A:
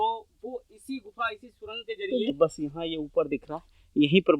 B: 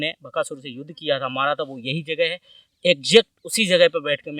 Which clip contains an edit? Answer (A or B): A